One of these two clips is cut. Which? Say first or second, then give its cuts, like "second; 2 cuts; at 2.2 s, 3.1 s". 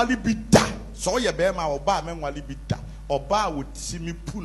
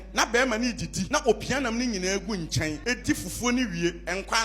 second; 2 cuts; at 1.0 s, 2.8 s